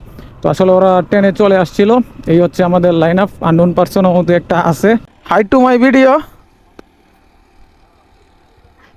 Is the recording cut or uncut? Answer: cut